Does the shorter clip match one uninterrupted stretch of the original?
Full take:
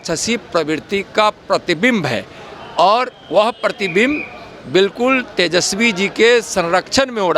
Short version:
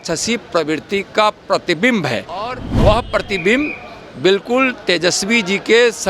no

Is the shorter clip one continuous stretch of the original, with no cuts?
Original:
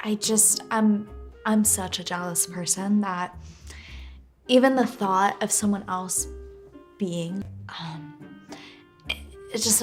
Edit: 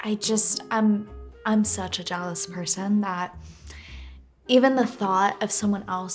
yes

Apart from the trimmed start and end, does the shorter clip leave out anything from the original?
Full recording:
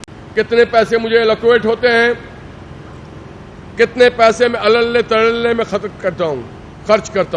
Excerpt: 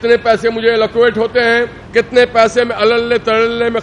yes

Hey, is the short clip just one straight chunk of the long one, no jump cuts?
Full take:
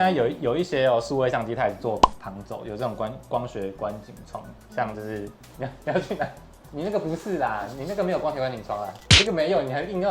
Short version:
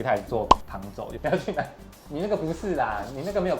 no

